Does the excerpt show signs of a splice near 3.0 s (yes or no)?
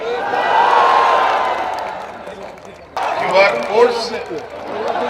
yes